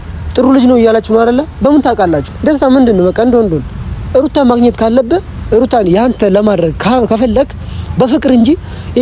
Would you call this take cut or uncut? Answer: cut